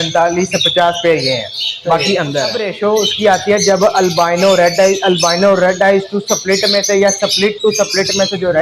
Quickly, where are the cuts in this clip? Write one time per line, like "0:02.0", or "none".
0:02.7